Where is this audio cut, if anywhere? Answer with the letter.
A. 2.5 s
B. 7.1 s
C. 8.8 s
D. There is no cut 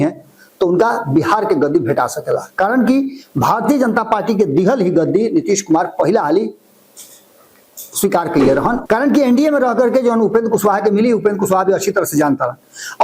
C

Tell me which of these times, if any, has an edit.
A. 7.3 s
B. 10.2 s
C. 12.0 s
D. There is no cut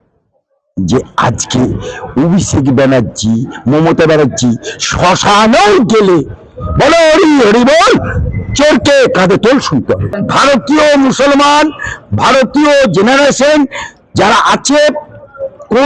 B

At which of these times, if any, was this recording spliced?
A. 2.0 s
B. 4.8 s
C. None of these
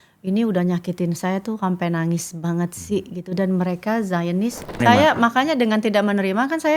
B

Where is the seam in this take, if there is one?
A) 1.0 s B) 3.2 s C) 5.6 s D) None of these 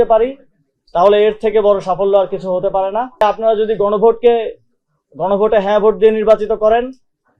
B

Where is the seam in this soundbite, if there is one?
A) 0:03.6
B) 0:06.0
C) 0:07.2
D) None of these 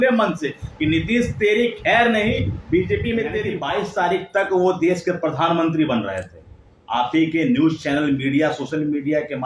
A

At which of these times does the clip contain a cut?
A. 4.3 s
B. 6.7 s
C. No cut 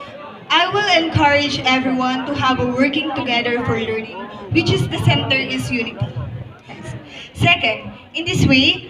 B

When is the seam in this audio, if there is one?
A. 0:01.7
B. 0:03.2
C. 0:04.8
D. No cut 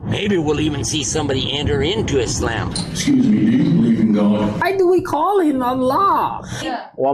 D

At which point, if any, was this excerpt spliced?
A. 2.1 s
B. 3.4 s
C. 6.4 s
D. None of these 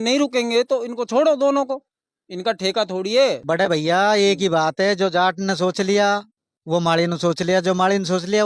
B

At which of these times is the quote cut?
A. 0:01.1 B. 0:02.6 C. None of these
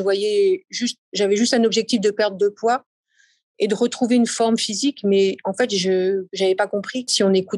C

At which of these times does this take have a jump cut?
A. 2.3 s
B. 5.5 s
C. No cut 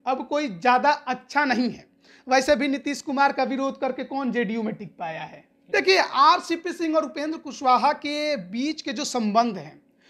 B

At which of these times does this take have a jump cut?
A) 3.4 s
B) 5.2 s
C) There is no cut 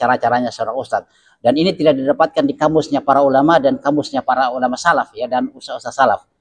C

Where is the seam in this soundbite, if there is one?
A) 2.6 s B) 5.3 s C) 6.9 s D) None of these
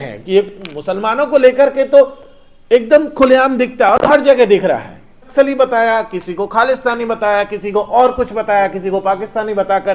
B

